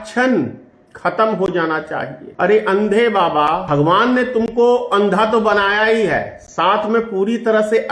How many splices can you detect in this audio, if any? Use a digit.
2